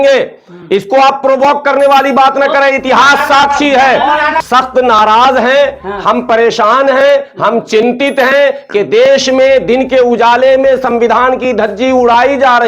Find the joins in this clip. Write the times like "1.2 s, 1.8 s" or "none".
4.4 s